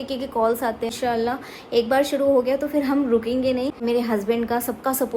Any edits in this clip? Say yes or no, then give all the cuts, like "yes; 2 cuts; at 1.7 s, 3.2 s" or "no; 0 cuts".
yes; 2 cuts; at 1.0 s, 3.8 s